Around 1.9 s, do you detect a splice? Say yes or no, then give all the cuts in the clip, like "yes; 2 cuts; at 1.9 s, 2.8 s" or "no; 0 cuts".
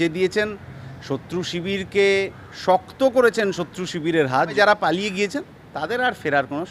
no; 1 cut; at 4.5 s